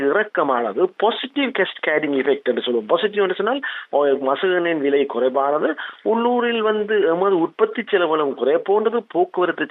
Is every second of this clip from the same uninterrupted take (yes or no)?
yes